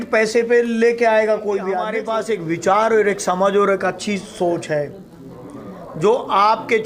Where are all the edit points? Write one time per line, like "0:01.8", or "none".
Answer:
0:02.0